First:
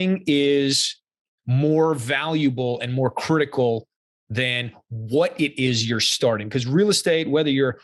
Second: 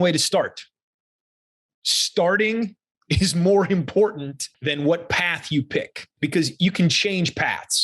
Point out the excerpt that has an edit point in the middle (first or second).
second